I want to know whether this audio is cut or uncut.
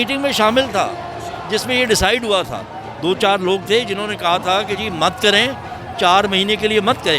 uncut